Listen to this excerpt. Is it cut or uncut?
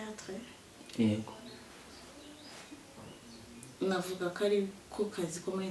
uncut